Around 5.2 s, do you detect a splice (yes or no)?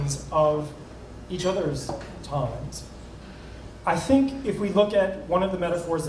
yes